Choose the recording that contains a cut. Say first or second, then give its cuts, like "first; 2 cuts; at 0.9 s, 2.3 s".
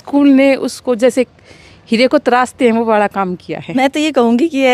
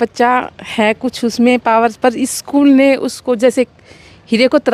first; 1 cut; at 3.8 s